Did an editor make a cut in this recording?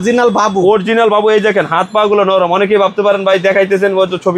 no; 0 cuts

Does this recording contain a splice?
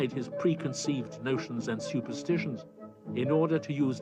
yes; 1 cut; at 1.5 s

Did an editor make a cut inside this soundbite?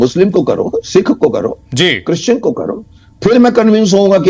no; 0 cuts

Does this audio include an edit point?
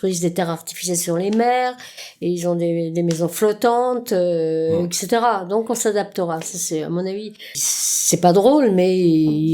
yes; 1 cut; at 7.6 s

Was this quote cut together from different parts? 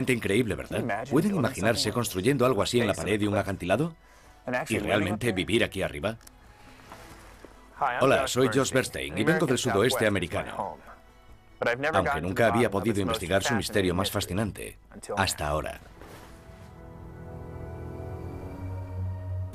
yes; 1 cut; at 13.0 s

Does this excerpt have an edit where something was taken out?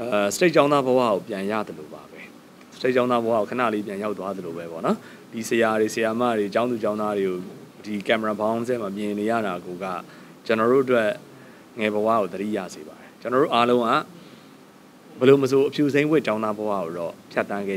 no; 0 cuts

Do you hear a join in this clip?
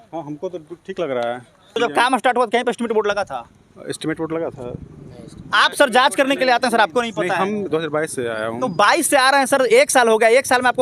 yes; 1 cut; at 1.7 s

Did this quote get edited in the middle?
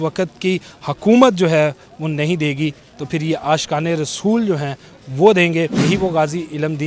yes; 1 cut; at 5.8 s

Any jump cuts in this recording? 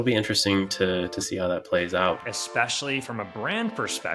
yes; 1 cut; at 2.2 s

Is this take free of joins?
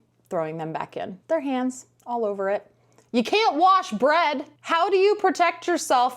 no; 1 cut; at 1.2 s

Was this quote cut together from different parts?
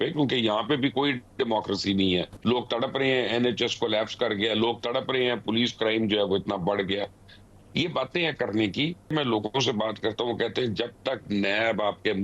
yes; 2 cuts; at 2.3 s, 9.1 s

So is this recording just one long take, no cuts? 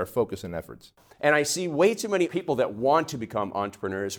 no; 2 cuts; at 0.9 s, 2.3 s

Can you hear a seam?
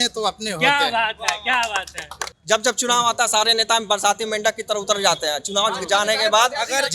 yes; 1 cut; at 2.3 s

